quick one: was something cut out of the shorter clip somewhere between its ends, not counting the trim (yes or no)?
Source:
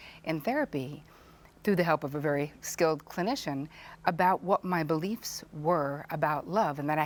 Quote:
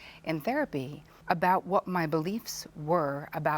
yes